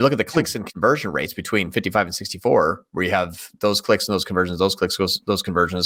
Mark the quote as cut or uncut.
uncut